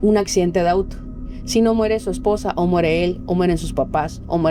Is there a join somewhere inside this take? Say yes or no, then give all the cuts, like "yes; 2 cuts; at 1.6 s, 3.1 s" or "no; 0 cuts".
no; 0 cuts